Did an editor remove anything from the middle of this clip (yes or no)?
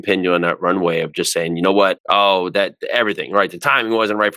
no